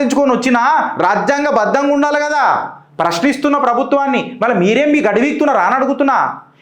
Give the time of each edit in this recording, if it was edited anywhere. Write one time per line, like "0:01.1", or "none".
none